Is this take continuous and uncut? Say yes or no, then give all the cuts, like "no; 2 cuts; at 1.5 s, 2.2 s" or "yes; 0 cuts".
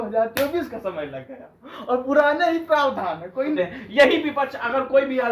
no; 1 cut; at 3.6 s